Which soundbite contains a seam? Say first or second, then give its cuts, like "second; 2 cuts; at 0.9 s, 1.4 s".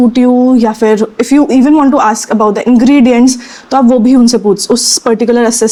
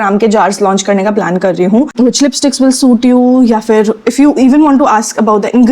second; 1 cut; at 1.9 s